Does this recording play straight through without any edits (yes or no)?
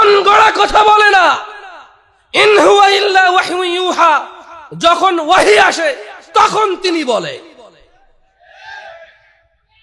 yes